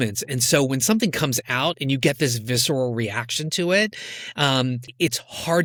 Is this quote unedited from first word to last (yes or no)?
yes